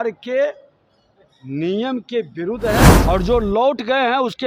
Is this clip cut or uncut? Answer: cut